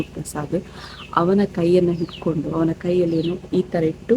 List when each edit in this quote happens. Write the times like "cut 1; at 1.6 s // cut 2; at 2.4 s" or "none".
none